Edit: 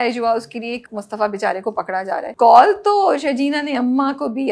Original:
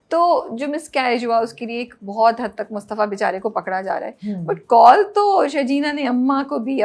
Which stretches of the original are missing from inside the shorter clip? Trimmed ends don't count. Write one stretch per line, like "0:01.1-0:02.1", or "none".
0:02.0-0:02.7
0:04.1-0:04.6